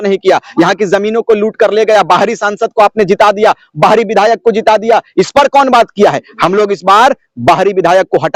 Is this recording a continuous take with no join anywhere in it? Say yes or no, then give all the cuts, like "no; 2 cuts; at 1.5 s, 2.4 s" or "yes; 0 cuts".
yes; 0 cuts